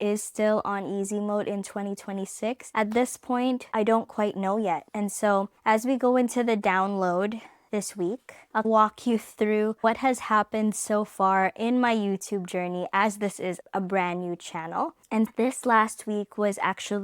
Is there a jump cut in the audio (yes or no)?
yes